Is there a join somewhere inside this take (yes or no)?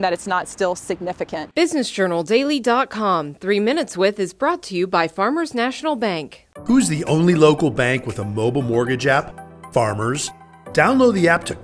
yes